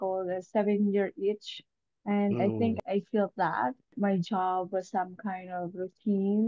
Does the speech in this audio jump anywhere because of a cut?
yes; 1 cut; at 2.8 s

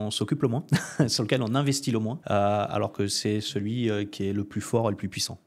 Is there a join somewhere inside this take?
yes; 1 cut; at 2.2 s

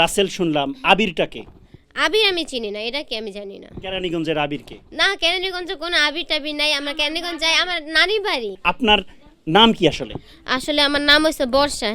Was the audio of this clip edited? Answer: no; 0 cuts

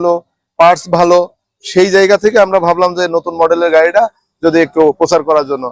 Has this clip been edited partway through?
no; 0 cuts

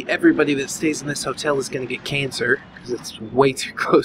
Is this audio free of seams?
yes; 0 cuts

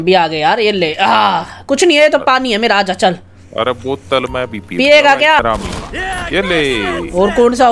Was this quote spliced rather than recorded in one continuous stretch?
yes; 1 cut; at 5.4 s

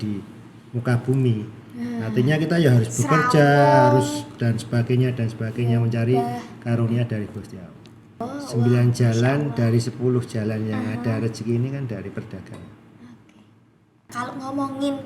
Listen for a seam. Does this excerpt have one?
yes; 2 cuts; at 8.2 s, 14.1 s

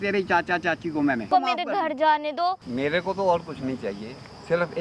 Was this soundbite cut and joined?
yes; 2 cuts; at 1.3 s, 2.7 s

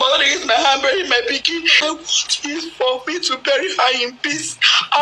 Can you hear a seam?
yes; 1 cut; at 1.8 s

